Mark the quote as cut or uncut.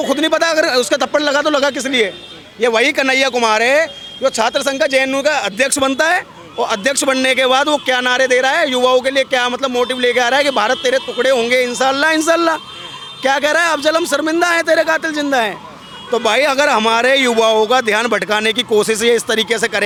uncut